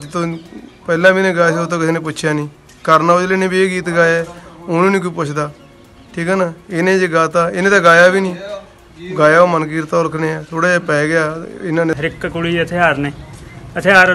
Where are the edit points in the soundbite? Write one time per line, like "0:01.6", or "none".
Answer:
0:12.0